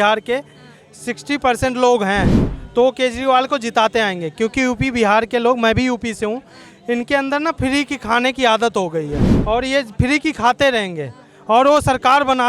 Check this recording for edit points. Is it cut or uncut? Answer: cut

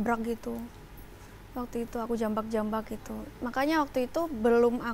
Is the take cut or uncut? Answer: uncut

